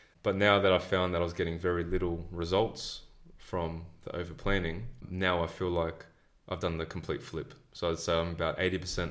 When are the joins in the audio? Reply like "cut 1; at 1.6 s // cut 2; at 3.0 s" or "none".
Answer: cut 1; at 5.0 s